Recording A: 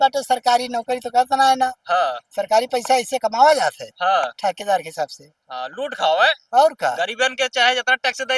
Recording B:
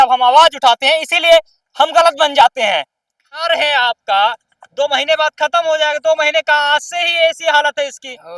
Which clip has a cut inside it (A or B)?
B